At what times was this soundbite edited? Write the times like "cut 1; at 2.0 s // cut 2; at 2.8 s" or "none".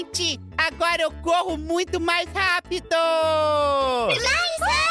none